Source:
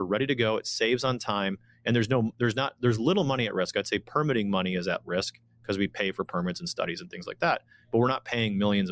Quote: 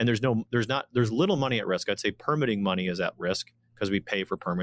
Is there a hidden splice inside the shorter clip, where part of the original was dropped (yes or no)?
no